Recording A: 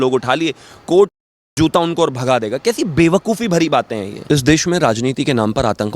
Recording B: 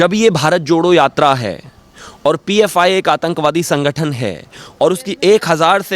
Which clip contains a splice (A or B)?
A